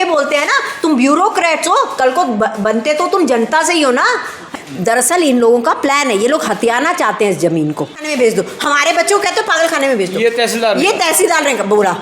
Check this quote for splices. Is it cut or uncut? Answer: cut